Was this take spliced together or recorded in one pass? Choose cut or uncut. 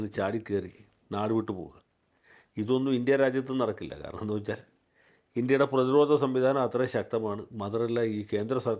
uncut